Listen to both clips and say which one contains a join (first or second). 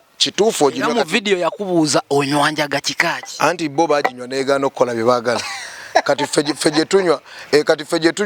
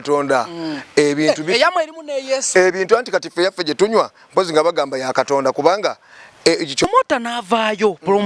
second